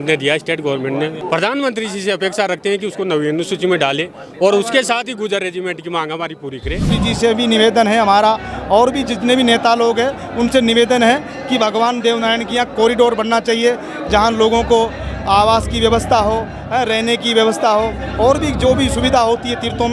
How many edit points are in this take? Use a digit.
2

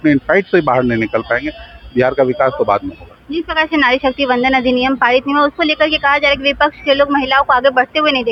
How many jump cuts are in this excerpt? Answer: 0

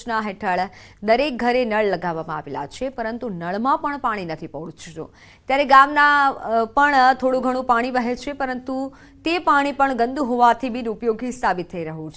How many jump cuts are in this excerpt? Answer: 0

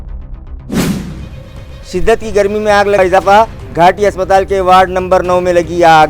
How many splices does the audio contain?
1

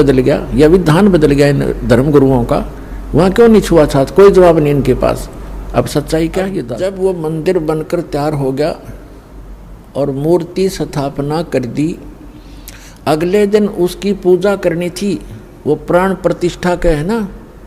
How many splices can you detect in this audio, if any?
1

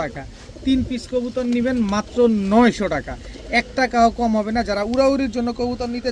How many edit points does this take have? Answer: 0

